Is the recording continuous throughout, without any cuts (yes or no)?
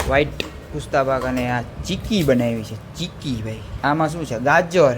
no